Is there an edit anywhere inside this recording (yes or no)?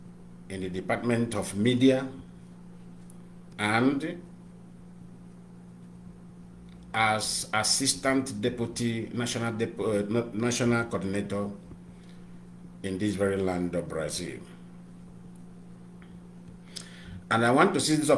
yes